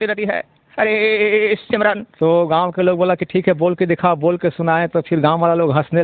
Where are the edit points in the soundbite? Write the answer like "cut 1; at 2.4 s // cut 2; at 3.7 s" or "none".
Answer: cut 1; at 2.1 s